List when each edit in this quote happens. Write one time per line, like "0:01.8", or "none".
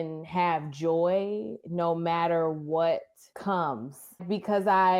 0:03.2
0:04.2